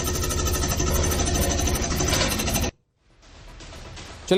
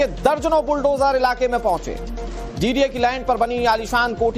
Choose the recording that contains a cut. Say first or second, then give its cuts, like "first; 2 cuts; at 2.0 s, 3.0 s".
second; 1 cut; at 2.9 s